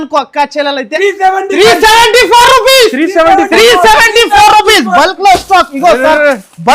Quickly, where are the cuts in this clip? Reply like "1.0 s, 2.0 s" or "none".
1.0 s